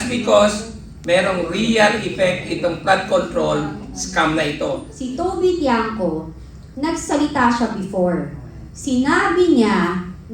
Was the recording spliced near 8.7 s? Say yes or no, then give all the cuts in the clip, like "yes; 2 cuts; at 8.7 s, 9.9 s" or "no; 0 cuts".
no; 1 cut; at 4.9 s